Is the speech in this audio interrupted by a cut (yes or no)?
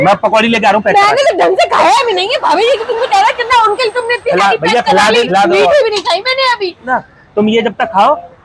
yes